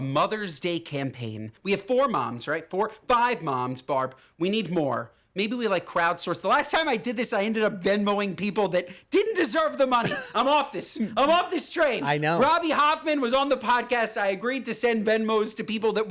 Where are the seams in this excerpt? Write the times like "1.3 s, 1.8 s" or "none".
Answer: 1.5 s

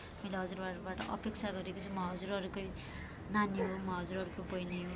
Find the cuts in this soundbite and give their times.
none

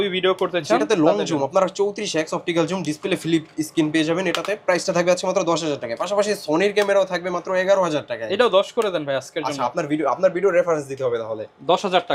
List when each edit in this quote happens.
none

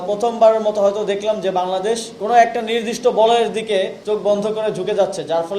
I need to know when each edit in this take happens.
2.1 s, 4.0 s

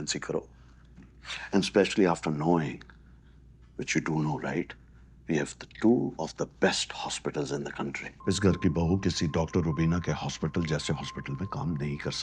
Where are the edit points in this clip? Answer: 8.1 s

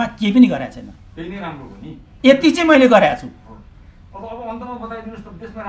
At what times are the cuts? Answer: none

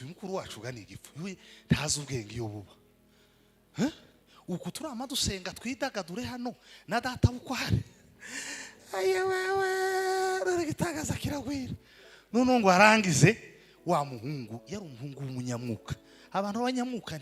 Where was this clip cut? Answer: none

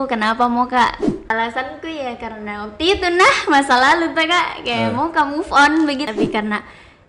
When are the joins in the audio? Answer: 1.3 s, 6.1 s

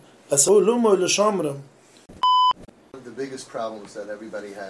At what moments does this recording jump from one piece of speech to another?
2.6 s

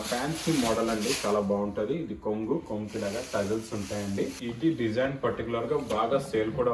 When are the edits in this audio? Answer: 4.4 s

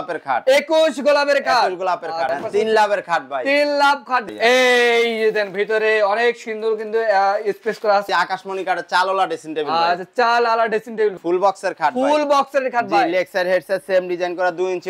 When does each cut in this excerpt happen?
2.3 s, 4.3 s, 8.1 s, 11.1 s

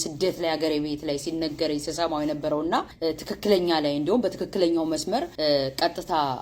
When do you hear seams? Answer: 2.9 s, 5.3 s

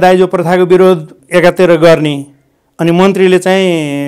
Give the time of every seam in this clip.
1.1 s

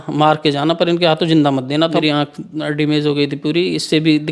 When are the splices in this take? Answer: 2.0 s

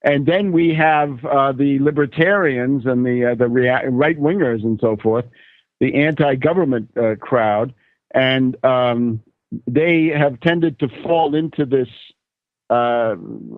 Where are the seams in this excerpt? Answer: 8.9 s

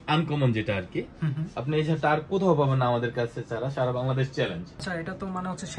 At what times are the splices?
4.8 s

